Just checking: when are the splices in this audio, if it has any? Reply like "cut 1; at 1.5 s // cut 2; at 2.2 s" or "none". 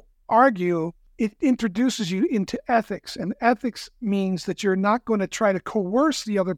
cut 1; at 1.0 s